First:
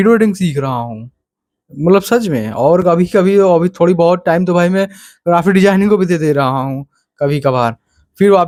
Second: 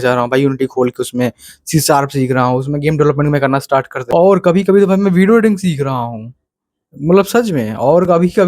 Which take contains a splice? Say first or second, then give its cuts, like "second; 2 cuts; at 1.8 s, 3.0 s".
second; 1 cut; at 4.0 s